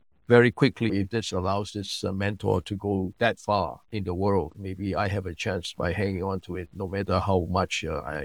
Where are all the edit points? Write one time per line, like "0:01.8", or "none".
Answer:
0:00.9
0:03.8
0:04.6